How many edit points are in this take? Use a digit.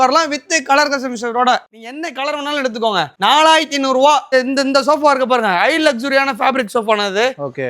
1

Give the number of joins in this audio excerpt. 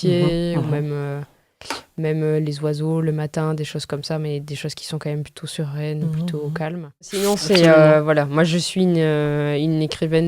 1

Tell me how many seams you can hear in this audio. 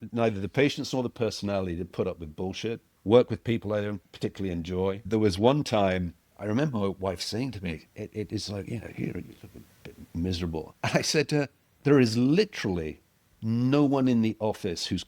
6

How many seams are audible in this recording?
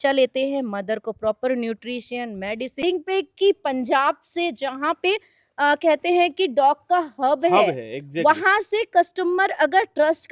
1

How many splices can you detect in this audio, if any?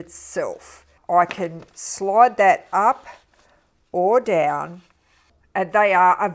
1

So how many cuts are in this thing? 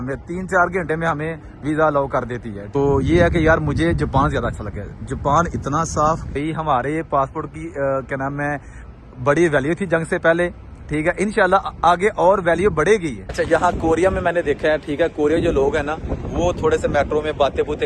3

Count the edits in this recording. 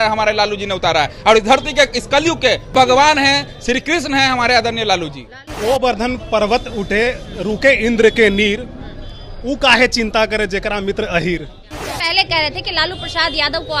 3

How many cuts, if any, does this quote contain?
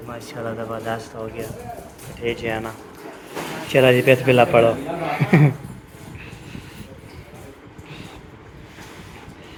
0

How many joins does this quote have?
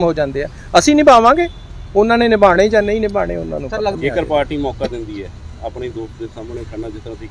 1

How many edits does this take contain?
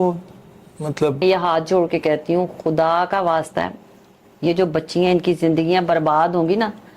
1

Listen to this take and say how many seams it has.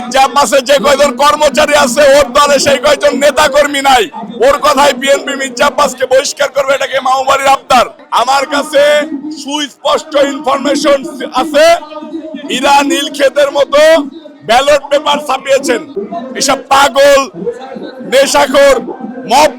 2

